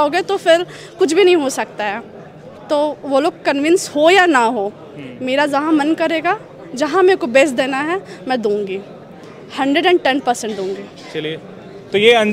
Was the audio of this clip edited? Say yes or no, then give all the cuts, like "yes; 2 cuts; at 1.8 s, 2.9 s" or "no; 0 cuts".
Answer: no; 0 cuts